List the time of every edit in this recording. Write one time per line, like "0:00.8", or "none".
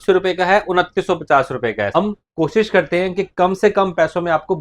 0:02.0